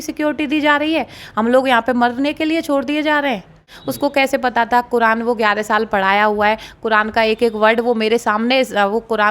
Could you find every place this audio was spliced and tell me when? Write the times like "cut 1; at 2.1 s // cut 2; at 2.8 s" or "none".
cut 1; at 3.8 s